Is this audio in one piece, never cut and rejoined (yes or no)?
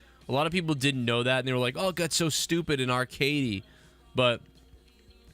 no